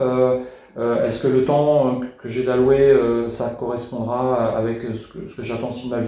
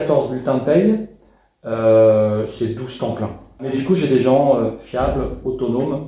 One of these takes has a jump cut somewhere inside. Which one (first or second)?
second